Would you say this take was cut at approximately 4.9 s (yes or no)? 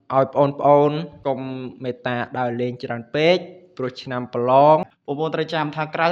yes